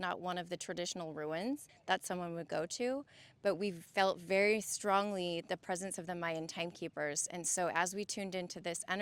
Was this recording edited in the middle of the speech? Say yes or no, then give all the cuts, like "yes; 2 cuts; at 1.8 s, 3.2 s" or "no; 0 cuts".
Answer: yes; 1 cut; at 1.7 s